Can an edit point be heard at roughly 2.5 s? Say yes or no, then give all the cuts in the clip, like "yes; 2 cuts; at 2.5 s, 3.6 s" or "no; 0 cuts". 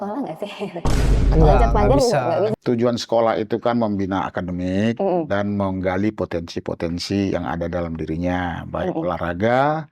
yes; 1 cut; at 2.5 s